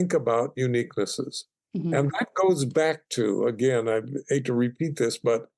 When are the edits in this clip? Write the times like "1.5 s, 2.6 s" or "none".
none